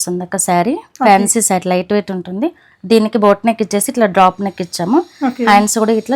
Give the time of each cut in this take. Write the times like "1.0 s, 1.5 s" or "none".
none